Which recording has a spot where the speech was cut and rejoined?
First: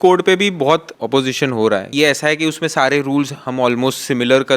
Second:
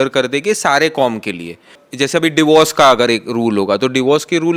first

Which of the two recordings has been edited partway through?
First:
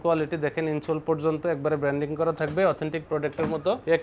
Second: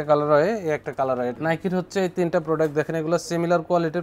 second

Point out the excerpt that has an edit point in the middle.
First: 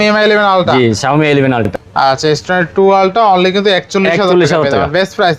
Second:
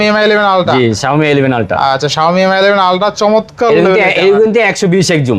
first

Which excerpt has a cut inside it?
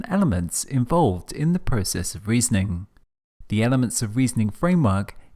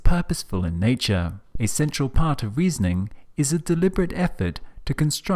second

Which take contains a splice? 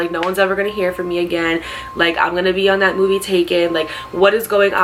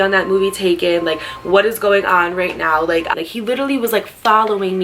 second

